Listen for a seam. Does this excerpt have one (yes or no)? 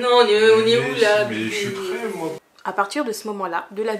yes